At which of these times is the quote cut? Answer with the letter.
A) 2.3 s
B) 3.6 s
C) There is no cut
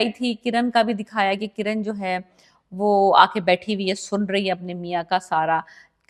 C